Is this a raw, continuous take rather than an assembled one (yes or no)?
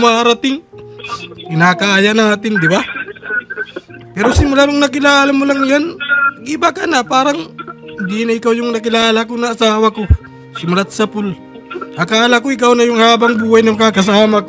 yes